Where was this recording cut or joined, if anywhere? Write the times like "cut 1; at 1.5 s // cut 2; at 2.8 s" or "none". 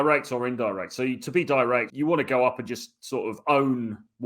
cut 1; at 1.9 s